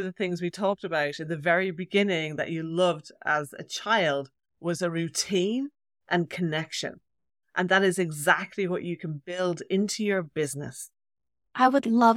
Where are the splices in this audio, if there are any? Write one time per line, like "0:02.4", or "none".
none